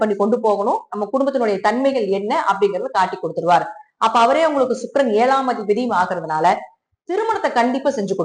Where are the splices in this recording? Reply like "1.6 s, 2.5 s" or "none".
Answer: none